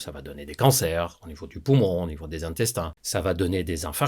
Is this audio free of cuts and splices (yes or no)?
no